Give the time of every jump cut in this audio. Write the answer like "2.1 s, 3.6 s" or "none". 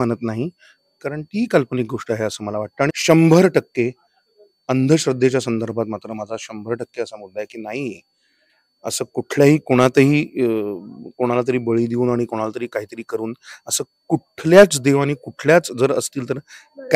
2.9 s

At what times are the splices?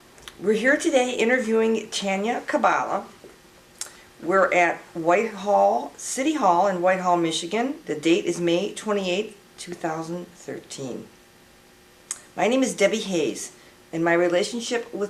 none

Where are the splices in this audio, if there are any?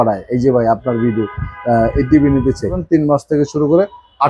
2.8 s

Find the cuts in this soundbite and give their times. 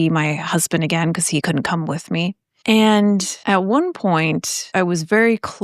1.4 s, 2.5 s, 3.3 s, 4.6 s

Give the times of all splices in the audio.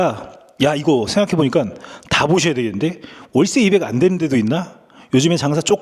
none

